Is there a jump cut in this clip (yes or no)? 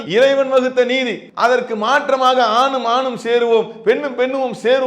yes